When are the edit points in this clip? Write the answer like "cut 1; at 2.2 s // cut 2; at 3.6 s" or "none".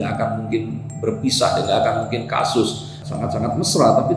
cut 1; at 3.0 s

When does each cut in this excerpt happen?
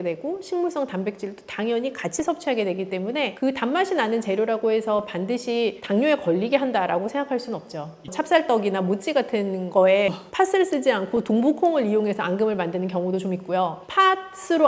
cut 1; at 8.0 s // cut 2; at 10.2 s

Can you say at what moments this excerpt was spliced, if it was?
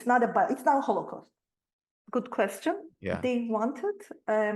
cut 1; at 2.0 s

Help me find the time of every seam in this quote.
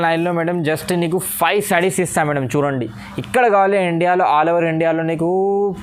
none

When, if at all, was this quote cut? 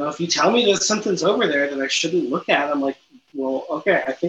none

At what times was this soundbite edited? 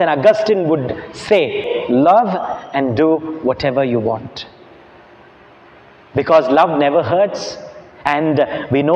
cut 1; at 1.7 s

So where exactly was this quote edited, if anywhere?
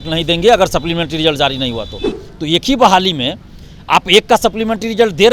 cut 1; at 2.2 s

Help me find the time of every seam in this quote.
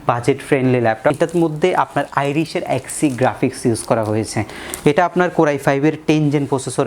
cut 1; at 1.2 s

